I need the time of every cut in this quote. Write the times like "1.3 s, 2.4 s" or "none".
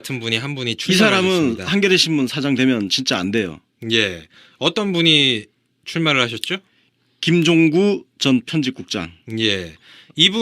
5.2 s